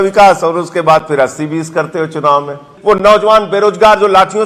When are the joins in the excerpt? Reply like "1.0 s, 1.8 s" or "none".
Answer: 2.7 s